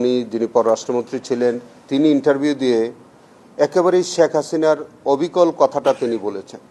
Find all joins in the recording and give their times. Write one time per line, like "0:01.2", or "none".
none